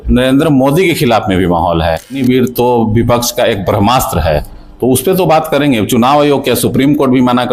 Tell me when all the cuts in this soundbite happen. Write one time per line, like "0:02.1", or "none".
0:02.2